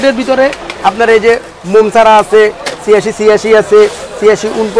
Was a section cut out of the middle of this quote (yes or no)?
no